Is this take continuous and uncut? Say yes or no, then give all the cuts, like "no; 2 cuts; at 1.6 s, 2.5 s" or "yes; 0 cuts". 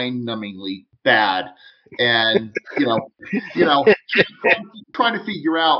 no; 2 cuts; at 3.2 s, 4.9 s